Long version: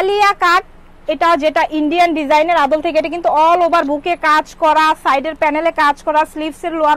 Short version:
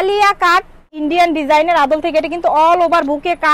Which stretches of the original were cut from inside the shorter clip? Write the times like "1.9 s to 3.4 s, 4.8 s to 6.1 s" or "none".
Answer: 0.9 s to 1.8 s